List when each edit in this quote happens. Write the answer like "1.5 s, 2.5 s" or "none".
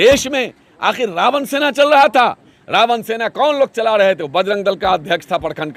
none